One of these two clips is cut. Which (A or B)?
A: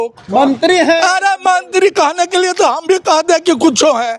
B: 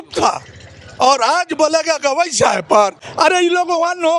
B